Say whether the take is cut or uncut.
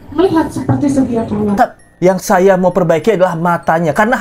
cut